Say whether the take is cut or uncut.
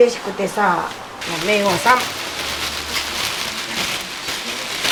uncut